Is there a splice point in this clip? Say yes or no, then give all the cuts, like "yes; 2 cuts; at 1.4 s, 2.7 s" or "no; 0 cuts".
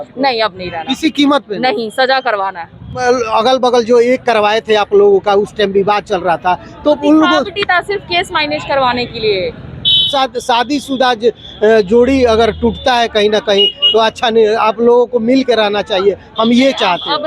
yes; 2 cuts; at 3.0 s, 10.1 s